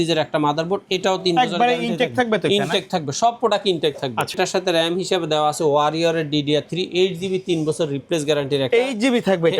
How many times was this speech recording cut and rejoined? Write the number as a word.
one